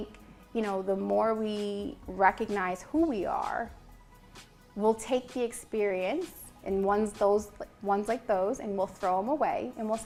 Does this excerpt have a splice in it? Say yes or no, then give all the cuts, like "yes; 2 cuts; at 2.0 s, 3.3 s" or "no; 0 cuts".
no; 0 cuts